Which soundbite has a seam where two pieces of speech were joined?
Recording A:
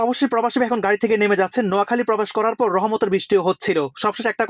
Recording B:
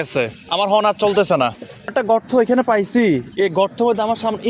B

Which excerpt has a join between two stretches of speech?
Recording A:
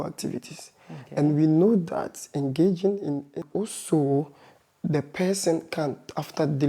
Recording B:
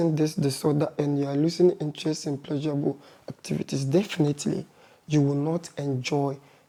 A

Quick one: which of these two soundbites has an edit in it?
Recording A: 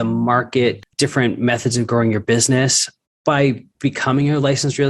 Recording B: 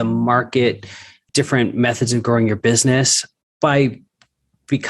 A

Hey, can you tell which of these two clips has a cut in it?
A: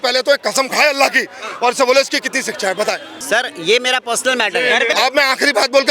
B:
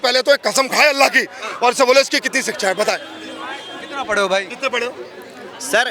A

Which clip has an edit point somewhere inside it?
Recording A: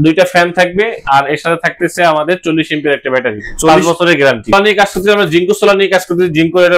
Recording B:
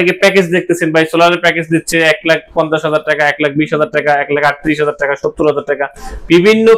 A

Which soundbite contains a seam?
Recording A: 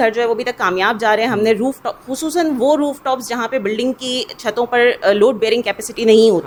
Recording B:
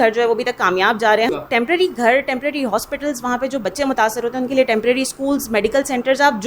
B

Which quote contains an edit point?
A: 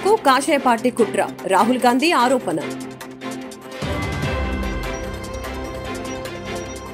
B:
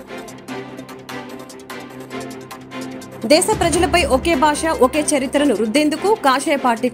B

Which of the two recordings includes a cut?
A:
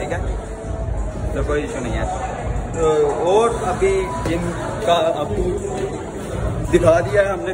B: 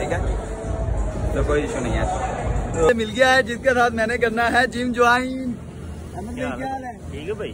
B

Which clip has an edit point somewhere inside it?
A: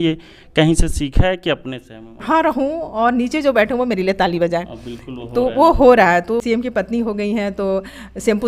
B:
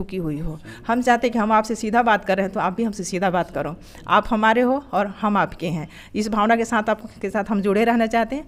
A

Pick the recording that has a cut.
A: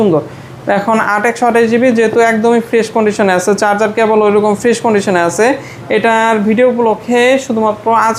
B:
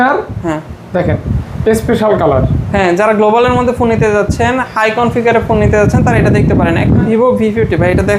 B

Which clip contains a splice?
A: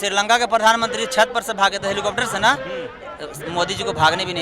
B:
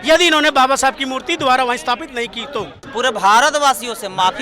B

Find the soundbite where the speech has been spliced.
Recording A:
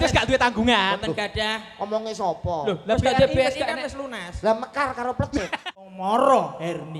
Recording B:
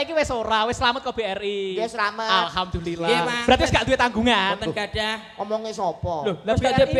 A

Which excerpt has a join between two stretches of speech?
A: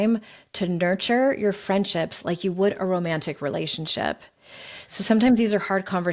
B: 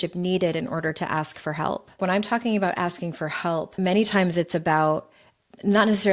B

